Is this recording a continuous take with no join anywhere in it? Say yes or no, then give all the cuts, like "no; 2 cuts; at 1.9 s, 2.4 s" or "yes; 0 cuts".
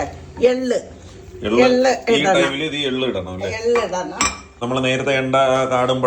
no; 1 cut; at 4.6 s